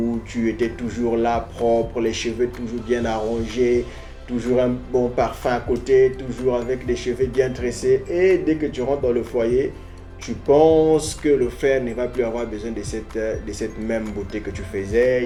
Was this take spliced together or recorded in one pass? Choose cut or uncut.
uncut